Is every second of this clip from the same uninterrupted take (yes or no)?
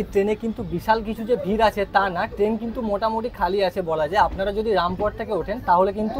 yes